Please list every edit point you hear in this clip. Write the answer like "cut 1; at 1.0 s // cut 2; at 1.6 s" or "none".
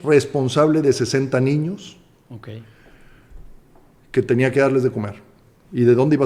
none